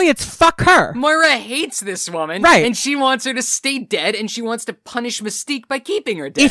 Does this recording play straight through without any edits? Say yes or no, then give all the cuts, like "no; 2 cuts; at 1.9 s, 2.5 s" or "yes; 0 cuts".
yes; 0 cuts